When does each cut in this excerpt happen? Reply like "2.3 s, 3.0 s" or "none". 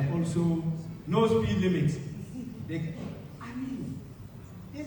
none